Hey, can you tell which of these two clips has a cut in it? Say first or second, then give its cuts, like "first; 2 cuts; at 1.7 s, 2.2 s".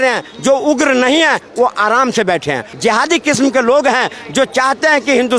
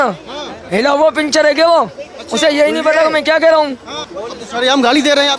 first; 1 cut; at 2.7 s